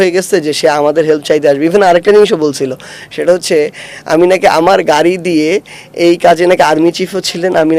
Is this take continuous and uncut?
yes; 0 cuts

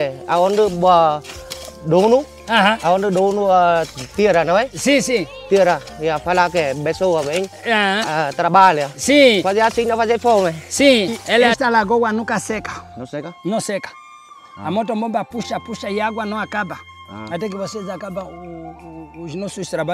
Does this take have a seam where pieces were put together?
yes; 1 cut; at 11.5 s

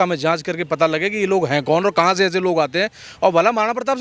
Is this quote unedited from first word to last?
yes; 0 cuts

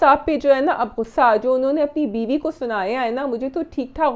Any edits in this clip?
no; 0 cuts

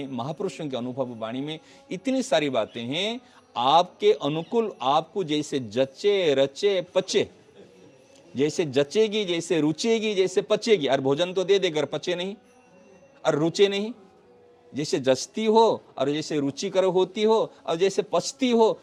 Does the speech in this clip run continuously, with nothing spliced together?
yes; 0 cuts

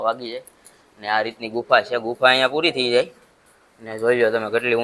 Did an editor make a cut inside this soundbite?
no; 0 cuts

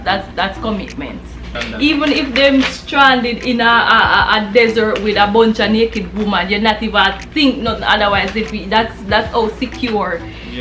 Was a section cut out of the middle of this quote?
yes; 1 cut; at 1.6 s

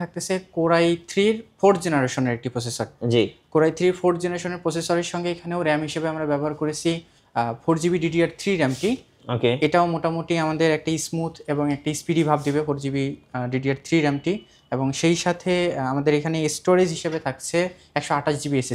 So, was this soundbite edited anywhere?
no; 0 cuts

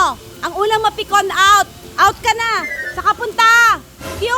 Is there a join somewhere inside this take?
no; 0 cuts

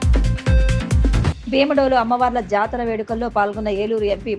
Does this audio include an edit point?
yes; 1 cut; at 1.2 s

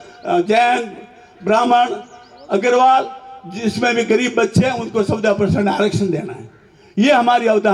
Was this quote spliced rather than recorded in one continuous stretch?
no; 0 cuts

